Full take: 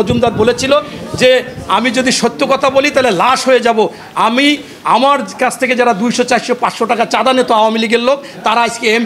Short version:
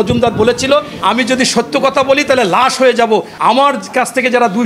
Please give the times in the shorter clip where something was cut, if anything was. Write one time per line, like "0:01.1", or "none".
0:00.9
0:03.3